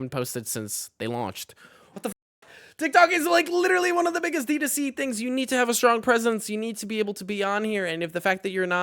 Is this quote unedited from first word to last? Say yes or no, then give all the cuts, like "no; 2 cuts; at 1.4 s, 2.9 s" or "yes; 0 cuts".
yes; 0 cuts